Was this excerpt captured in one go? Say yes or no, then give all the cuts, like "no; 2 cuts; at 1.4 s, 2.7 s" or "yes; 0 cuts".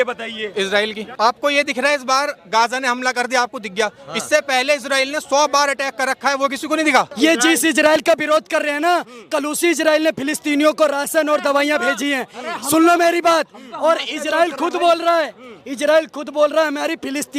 no; 2 cuts; at 1.0 s, 7.1 s